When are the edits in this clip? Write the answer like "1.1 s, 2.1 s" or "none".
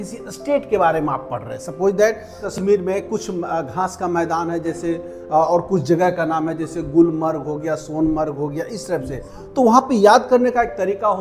2.5 s